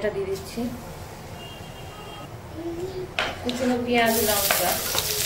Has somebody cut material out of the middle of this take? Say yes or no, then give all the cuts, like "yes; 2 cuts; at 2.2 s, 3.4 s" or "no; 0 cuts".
no; 0 cuts